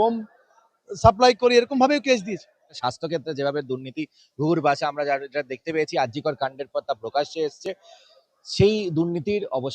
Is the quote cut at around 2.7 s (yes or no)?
yes